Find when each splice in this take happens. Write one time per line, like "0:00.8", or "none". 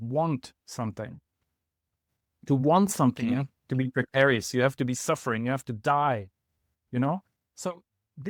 none